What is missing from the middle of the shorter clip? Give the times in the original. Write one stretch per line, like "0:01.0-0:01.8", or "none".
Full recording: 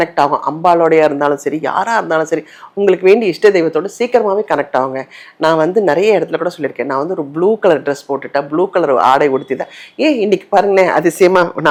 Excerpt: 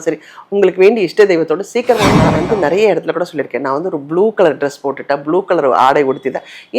0:04.5-0:05.5